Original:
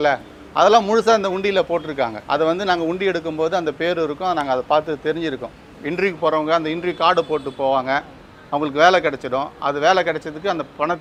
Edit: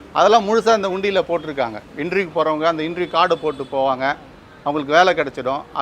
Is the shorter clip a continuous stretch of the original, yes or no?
no